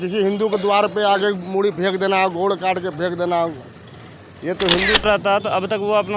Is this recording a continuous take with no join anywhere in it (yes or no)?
no